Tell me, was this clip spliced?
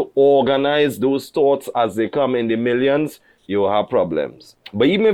no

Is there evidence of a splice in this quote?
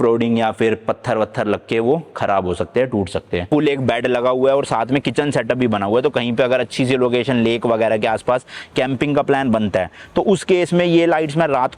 yes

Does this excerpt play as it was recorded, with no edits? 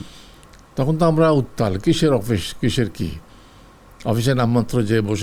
yes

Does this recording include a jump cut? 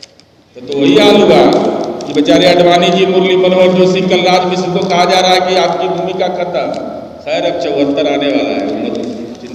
no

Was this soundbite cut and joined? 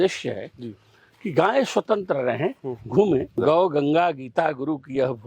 yes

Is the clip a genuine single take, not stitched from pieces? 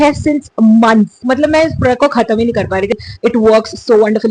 no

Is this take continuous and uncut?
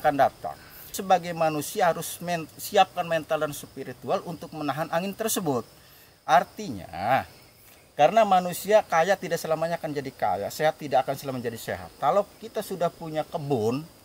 yes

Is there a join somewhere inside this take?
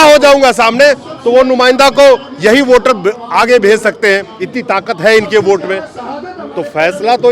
no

